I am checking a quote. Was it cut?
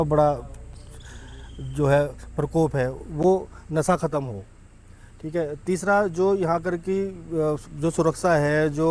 no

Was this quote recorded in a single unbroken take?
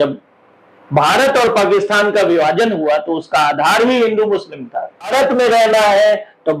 no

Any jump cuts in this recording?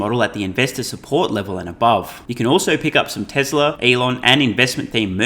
yes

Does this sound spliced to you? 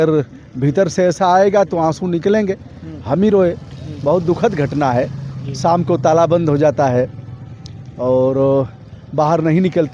no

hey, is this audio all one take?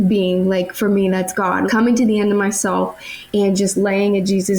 no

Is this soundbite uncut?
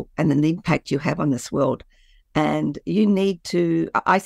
yes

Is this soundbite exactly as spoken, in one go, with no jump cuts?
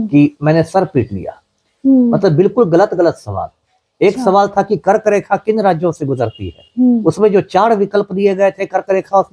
yes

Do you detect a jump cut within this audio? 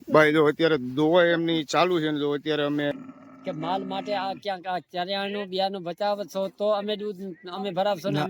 yes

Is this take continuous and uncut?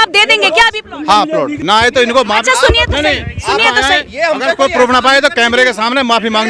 no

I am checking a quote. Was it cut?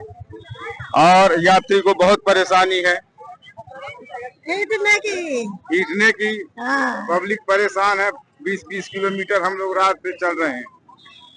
no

